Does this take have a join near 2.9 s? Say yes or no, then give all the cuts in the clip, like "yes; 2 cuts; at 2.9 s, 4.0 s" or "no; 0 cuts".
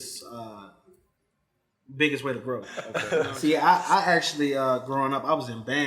yes; 1 cut; at 2.9 s